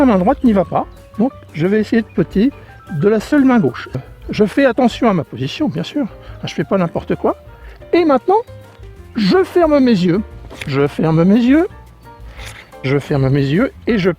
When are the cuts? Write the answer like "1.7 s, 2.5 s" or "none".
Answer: 3.9 s